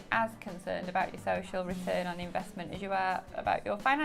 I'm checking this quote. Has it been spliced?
no; 0 cuts

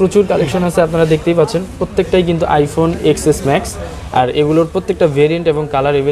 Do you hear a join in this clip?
no; 0 cuts

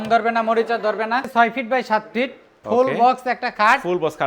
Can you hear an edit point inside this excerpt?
yes; 1 cut; at 1.3 s

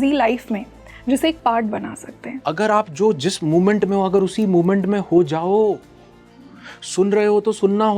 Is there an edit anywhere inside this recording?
yes; 1 cut; at 2.3 s

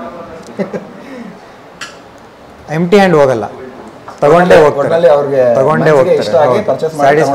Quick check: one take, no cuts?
yes; 0 cuts

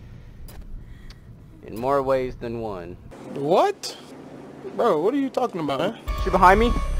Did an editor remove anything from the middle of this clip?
yes; 1 cut; at 6.1 s

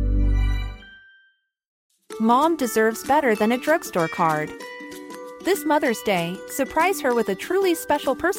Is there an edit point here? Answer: yes; 1 cut; at 1.7 s

